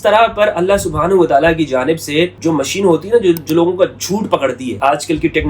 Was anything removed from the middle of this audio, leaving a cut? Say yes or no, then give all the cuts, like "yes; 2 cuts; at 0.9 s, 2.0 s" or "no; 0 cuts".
yes; 2 cuts; at 2.4 s, 4.7 s